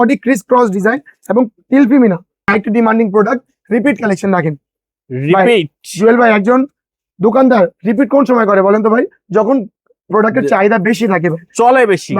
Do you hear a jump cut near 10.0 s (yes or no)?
no